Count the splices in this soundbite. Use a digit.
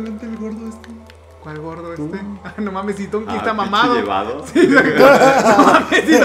0